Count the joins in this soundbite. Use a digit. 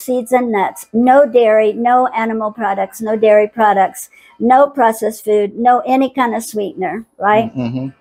0